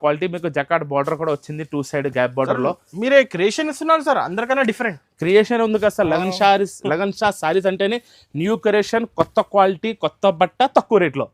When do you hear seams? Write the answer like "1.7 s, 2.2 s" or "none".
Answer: none